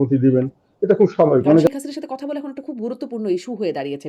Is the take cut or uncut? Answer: cut